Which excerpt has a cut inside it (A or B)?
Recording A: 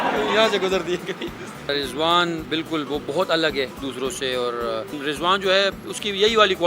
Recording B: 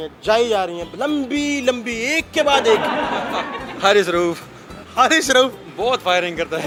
A